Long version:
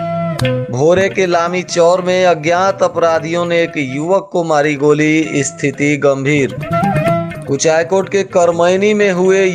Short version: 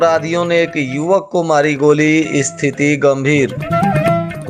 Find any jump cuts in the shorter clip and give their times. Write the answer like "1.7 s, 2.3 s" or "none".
none